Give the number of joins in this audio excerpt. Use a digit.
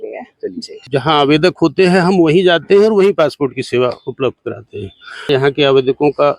2